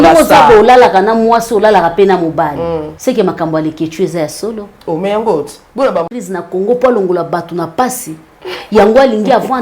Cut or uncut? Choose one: cut